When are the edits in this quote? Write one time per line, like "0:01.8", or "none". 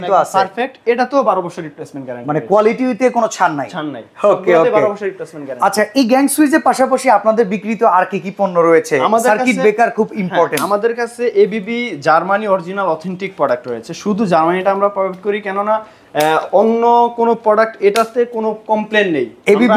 none